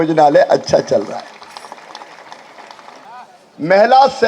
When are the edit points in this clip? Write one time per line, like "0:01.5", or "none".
0:03.0